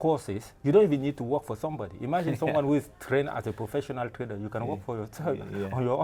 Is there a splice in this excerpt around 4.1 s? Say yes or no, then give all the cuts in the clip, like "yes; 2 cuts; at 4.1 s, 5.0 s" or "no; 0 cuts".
no; 0 cuts